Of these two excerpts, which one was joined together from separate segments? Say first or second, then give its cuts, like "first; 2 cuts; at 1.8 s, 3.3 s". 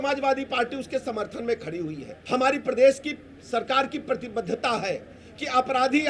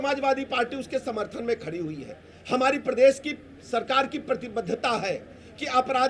first; 1 cut; at 2.1 s